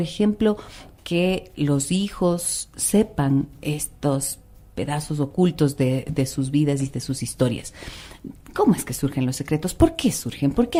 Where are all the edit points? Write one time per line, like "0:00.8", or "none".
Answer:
none